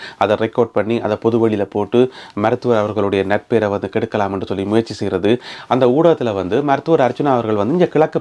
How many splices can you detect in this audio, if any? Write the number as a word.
one